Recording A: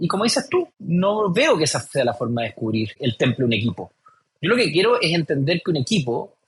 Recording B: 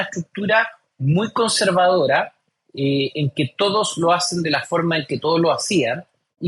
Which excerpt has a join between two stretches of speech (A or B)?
A